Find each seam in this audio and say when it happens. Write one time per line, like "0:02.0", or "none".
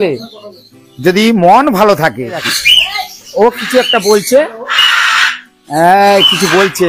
0:02.6